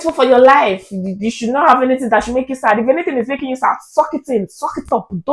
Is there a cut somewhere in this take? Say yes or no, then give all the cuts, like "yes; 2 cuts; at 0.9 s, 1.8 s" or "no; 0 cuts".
no; 0 cuts